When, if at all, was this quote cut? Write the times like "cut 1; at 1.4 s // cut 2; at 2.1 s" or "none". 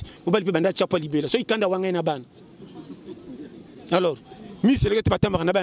none